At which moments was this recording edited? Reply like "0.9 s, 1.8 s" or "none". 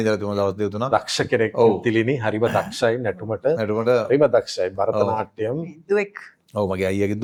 none